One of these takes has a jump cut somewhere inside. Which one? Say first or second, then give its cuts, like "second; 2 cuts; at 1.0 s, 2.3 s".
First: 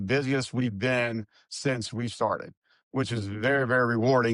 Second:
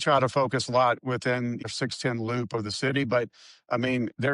second; 1 cut; at 1.6 s